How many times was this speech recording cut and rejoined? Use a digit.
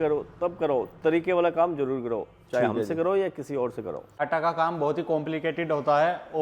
1